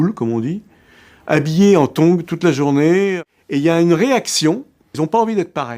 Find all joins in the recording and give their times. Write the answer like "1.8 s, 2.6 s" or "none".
3.2 s, 4.9 s